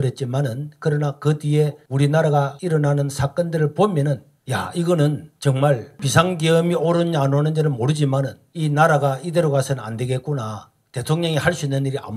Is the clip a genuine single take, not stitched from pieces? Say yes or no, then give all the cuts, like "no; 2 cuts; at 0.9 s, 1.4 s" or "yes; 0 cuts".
yes; 0 cuts